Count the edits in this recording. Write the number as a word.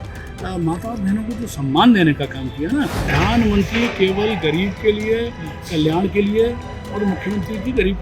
one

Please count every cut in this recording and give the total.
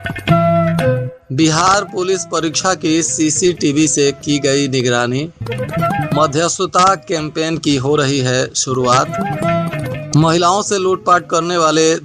one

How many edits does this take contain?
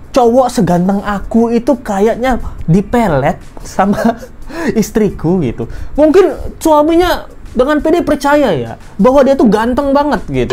zero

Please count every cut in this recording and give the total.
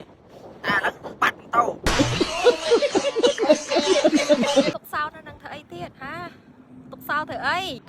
one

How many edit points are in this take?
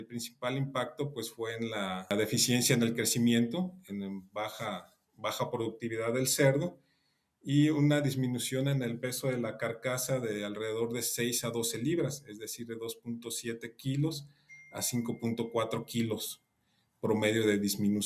one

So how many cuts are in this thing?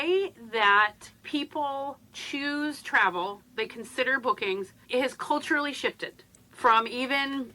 three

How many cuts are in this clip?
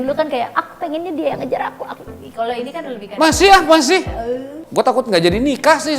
one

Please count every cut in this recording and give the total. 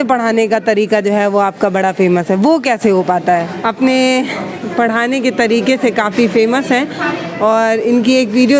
zero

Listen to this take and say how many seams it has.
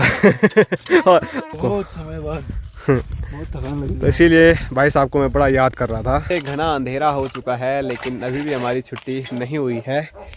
two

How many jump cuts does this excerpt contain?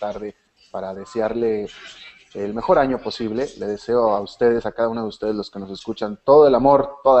one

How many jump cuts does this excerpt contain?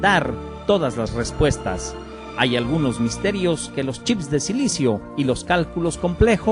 one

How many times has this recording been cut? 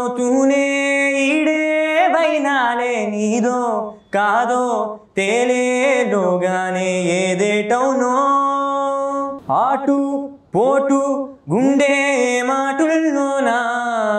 one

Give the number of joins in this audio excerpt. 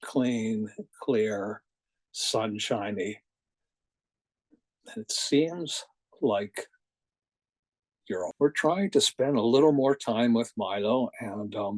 one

